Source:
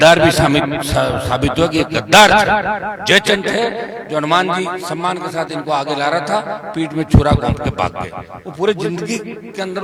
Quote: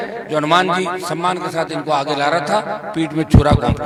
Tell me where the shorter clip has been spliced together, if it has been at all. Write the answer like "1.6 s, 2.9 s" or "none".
none